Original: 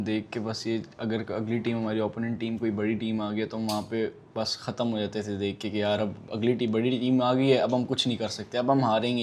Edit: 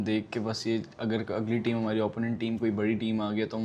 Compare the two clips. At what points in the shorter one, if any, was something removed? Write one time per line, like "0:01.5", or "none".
none